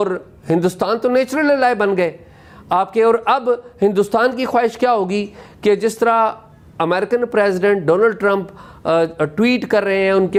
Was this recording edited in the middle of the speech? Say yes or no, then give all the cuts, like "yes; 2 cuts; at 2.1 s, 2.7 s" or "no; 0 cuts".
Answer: no; 0 cuts